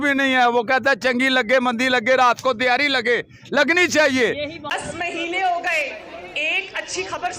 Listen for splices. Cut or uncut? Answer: uncut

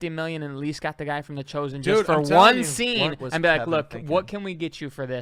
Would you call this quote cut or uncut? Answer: uncut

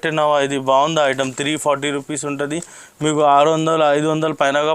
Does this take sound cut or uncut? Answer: uncut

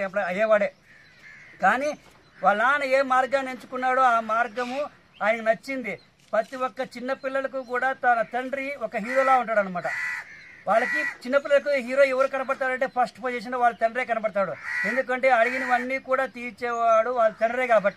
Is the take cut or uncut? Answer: uncut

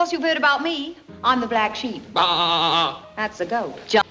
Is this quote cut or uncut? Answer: uncut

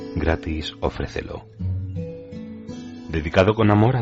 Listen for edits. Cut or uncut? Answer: cut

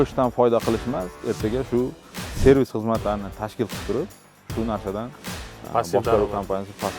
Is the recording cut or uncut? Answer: uncut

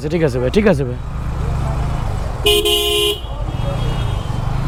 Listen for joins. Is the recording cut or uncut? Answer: uncut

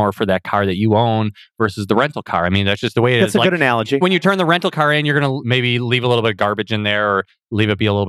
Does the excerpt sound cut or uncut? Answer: cut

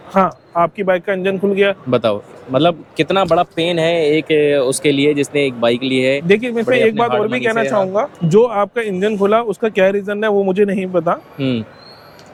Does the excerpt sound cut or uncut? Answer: uncut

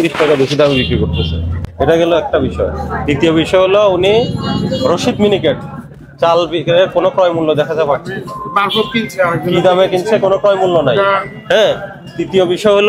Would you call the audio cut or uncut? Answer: uncut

